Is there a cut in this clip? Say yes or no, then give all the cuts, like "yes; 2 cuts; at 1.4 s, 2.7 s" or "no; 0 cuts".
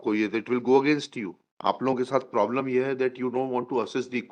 yes; 1 cut; at 1.8 s